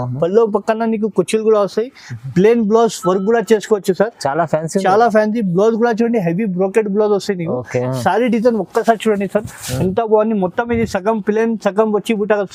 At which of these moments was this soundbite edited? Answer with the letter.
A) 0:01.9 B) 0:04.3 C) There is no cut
C